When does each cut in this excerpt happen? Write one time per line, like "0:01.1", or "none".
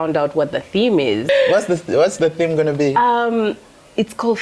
0:01.2

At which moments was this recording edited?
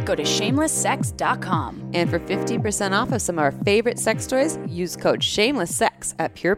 none

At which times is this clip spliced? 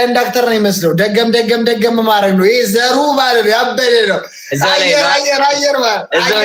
none

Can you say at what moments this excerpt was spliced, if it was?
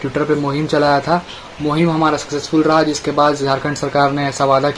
none

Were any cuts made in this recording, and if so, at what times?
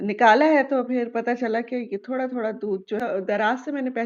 0:03.0

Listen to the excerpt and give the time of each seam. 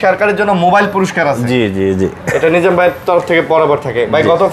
none

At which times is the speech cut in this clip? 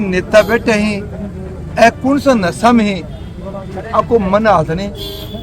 none

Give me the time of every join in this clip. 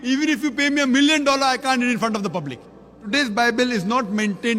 0:03.0

